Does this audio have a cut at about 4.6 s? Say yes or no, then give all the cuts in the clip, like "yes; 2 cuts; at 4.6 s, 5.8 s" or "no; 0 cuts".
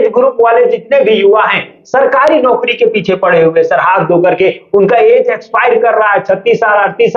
no; 0 cuts